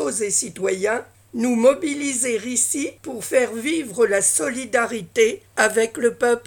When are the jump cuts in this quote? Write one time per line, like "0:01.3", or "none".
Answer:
0:01.2
0:03.1
0:05.4